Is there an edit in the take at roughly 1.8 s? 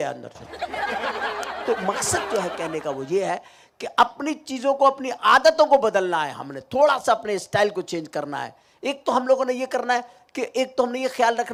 no; 0 cuts

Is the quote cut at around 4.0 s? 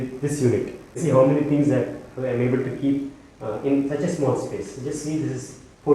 no; 1 cut; at 1.0 s

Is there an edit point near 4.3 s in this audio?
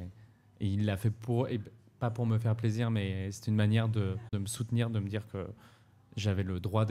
yes; 1 cut; at 4.3 s

